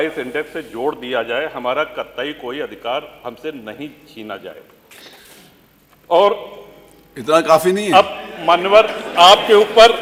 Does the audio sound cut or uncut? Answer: uncut